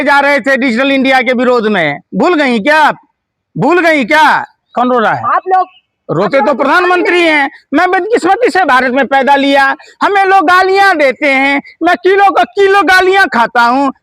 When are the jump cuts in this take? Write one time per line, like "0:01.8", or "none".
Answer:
0:04.6